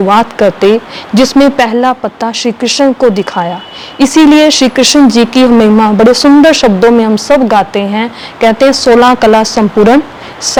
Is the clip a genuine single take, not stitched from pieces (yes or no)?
yes